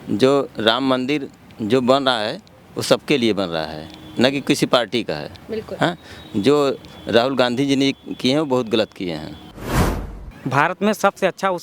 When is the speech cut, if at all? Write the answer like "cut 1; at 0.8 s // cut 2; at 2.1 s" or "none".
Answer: cut 1; at 10.0 s